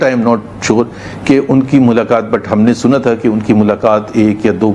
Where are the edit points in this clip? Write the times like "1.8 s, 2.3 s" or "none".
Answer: none